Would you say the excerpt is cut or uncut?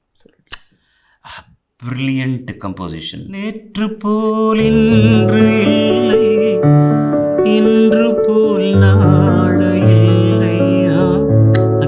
cut